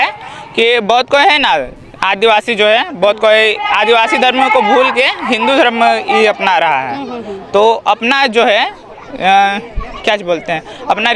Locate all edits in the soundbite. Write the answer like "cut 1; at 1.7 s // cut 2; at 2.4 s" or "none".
none